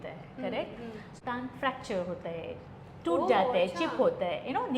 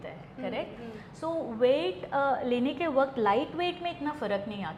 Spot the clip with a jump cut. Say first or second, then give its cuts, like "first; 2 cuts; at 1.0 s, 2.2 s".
first; 1 cut; at 1.1 s